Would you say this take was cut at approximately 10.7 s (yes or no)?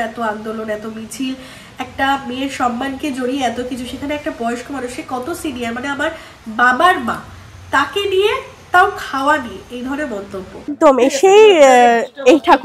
yes